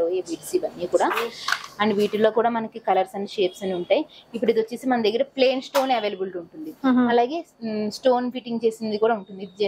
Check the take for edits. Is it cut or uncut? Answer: uncut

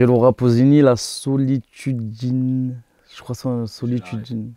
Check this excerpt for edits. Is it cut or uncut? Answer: uncut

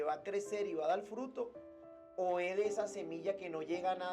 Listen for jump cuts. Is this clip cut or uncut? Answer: uncut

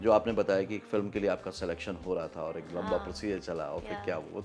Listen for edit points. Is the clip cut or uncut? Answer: uncut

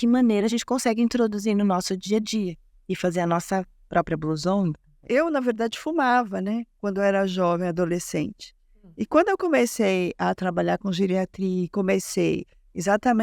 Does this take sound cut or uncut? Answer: cut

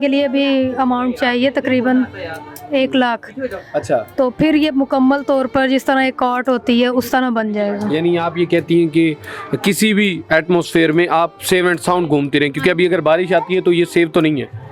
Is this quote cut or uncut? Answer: uncut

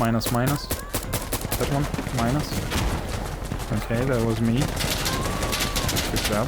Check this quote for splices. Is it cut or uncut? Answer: uncut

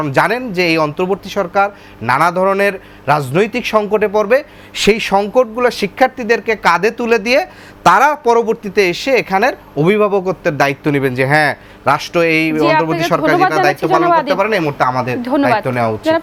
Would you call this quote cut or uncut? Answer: uncut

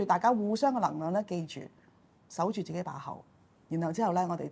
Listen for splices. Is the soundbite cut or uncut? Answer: uncut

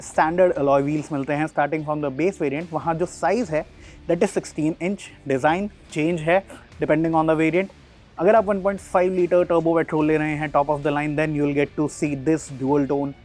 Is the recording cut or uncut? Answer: uncut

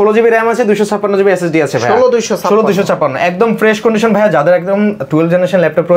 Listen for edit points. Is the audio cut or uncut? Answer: uncut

